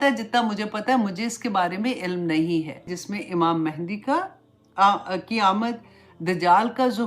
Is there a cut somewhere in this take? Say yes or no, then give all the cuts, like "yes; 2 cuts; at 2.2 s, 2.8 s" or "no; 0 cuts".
yes; 1 cut; at 3.0 s